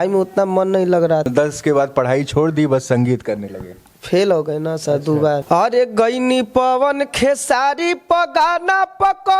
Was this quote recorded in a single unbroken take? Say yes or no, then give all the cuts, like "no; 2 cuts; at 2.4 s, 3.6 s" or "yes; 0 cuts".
no; 2 cuts; at 1.3 s, 5.4 s